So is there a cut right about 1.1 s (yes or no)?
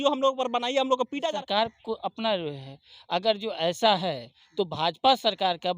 yes